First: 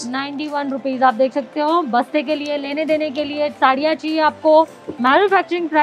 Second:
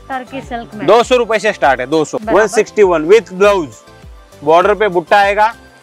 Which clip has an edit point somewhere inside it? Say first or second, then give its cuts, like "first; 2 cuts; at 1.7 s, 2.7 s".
second; 1 cut; at 2.2 s